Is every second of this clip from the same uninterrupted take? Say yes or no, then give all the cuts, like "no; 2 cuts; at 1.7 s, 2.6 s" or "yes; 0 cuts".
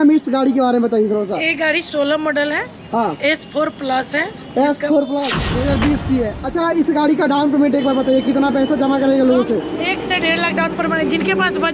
no; 1 cut; at 5.4 s